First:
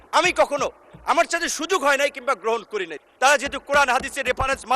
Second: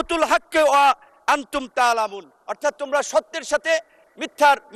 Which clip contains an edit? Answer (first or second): first